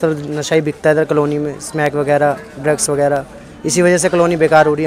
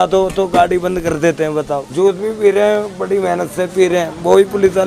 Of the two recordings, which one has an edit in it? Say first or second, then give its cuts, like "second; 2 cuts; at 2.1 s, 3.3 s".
second; 1 cut; at 1.9 s